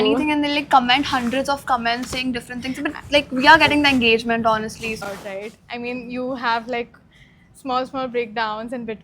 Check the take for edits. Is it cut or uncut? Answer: cut